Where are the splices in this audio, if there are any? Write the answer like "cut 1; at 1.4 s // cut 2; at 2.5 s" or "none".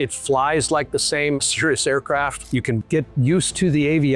cut 1; at 2.8 s